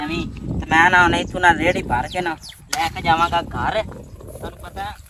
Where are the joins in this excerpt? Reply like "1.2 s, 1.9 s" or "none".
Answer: none